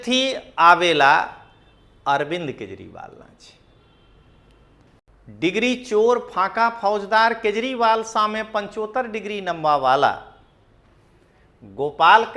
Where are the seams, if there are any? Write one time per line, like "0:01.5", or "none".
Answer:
0:05.0